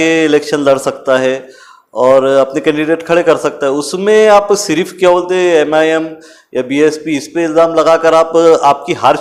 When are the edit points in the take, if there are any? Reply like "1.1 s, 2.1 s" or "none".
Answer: none